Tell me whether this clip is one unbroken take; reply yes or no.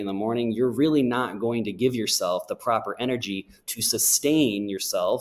yes